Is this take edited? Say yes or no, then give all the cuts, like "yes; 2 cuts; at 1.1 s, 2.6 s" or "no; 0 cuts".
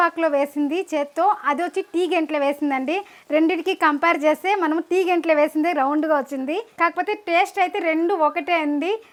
no; 0 cuts